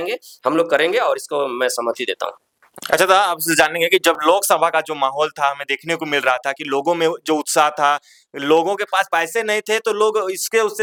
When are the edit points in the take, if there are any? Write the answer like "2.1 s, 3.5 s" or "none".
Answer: none